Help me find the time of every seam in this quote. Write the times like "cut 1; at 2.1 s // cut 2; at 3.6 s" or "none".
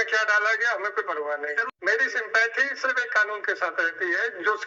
cut 1; at 1.7 s